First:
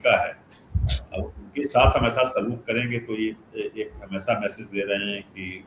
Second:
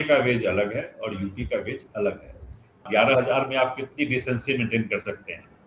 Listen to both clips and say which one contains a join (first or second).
second